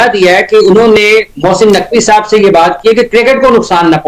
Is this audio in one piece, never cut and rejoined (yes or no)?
yes